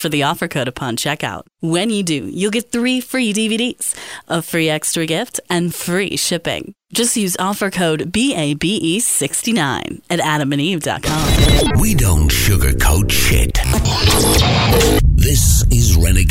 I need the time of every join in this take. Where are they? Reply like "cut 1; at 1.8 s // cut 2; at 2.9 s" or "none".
cut 1; at 11.2 s